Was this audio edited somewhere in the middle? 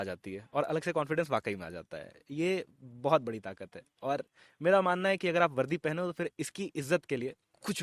no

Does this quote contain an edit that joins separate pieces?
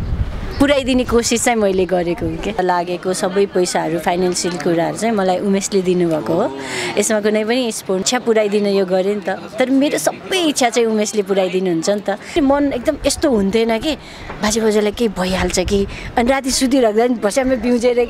yes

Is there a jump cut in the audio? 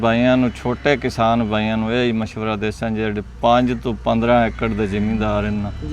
no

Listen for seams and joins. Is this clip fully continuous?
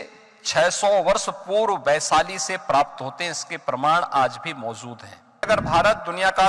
no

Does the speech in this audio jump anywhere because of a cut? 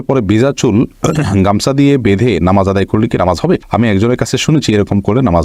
no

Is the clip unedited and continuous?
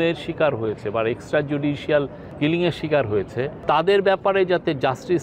no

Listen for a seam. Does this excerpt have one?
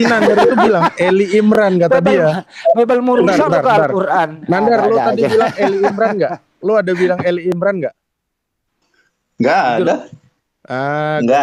no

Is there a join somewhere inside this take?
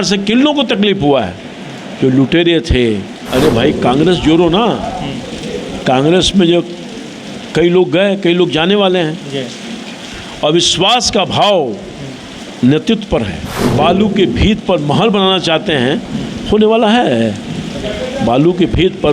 yes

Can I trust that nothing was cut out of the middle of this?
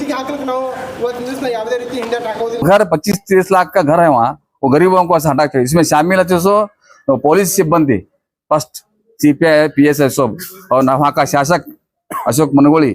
no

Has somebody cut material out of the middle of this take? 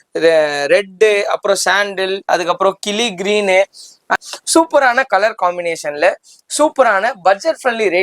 yes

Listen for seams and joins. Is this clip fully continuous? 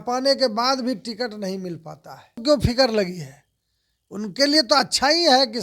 no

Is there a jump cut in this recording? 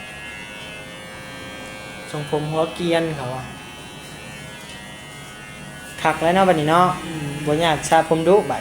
yes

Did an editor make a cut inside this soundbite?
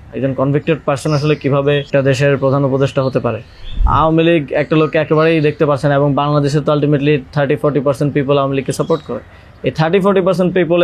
yes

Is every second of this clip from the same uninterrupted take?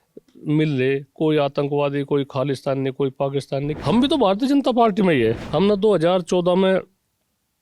no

